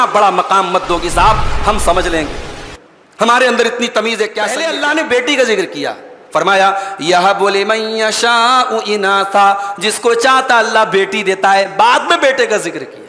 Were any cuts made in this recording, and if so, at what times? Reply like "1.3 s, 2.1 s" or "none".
4.5 s